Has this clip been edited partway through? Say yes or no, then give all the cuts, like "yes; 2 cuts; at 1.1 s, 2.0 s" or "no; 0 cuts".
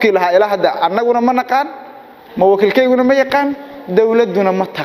no; 0 cuts